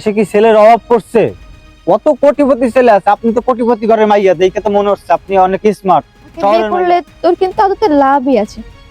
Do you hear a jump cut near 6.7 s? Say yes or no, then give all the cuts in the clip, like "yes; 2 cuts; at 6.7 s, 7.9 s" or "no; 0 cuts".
yes; 1 cut; at 6.7 s